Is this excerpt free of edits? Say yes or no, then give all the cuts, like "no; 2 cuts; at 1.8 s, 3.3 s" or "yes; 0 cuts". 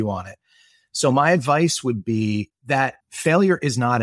no; 1 cut; at 3.0 s